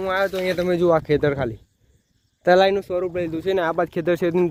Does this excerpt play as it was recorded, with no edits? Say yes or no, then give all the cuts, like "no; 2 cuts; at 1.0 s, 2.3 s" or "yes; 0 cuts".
yes; 0 cuts